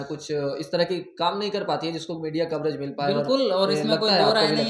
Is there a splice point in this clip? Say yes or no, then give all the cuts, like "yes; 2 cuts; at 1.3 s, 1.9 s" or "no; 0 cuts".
no; 0 cuts